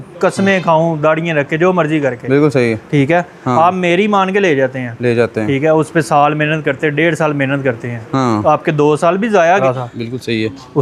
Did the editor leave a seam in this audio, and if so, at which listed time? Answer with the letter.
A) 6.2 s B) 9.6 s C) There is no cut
B